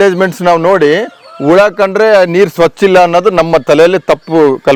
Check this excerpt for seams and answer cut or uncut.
uncut